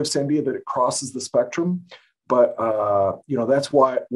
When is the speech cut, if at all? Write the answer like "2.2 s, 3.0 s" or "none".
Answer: none